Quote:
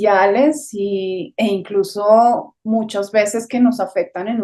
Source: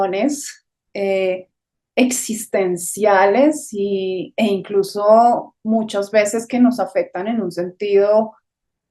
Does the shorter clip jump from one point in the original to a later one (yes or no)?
no